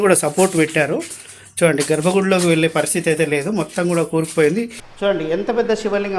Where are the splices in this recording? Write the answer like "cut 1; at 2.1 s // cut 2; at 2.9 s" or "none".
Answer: cut 1; at 4.8 s